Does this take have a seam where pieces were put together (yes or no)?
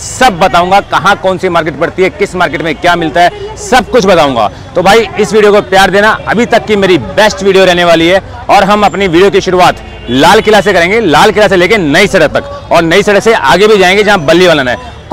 no